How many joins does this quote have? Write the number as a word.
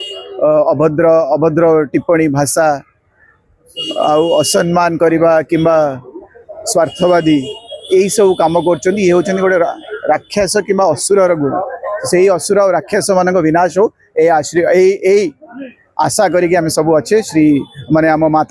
zero